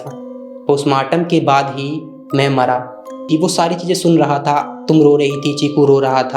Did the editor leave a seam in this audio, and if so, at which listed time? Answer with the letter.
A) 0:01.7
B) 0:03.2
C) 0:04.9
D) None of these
B